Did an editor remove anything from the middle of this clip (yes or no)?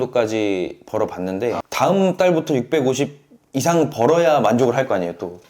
yes